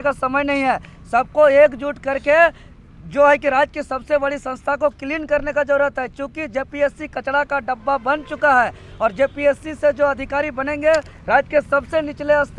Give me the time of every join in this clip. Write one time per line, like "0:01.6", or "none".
none